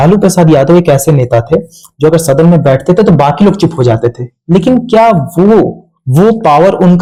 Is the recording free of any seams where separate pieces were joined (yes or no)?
yes